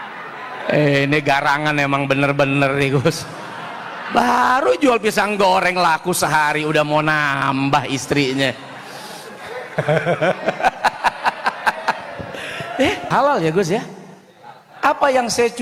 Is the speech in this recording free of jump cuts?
no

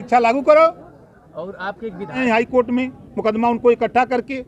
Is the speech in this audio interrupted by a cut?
yes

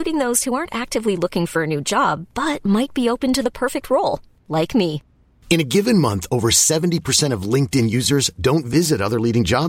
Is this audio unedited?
yes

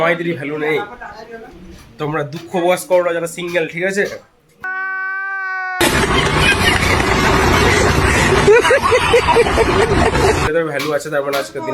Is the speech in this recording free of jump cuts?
no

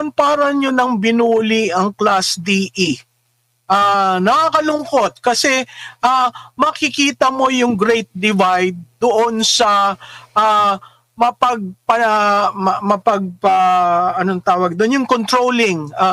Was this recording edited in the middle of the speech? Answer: no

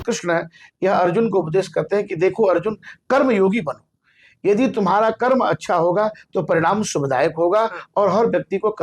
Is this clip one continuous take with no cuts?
yes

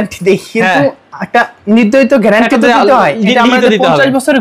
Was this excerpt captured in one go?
yes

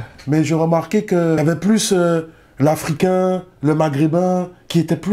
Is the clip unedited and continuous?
yes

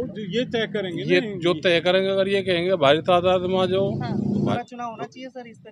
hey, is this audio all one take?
no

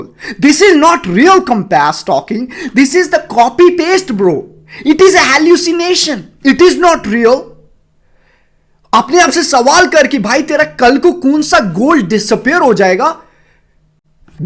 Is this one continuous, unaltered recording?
yes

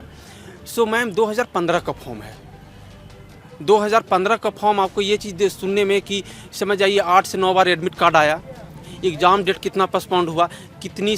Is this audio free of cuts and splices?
yes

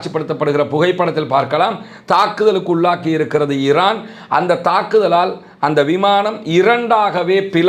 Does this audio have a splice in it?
no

